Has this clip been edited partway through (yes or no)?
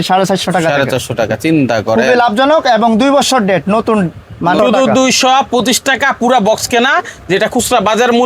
yes